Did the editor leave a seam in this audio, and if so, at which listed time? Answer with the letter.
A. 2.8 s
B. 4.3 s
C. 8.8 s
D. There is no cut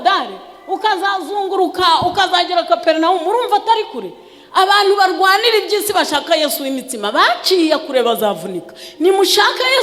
D